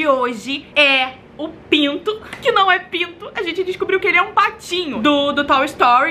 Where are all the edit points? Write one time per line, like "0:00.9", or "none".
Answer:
0:04.9